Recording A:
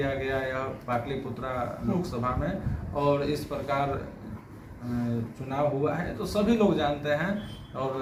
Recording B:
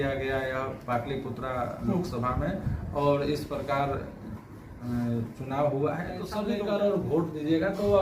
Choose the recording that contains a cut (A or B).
B